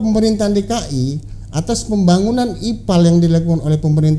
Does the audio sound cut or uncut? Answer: uncut